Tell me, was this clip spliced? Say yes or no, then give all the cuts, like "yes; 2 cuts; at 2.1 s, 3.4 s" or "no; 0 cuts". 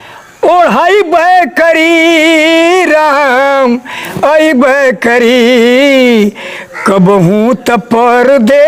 no; 0 cuts